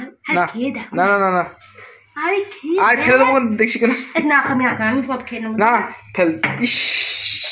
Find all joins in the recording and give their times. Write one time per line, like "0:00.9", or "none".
none